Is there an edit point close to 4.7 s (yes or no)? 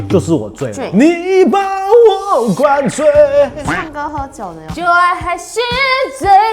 yes